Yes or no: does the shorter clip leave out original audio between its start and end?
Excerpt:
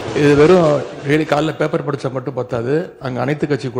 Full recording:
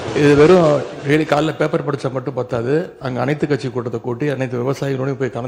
no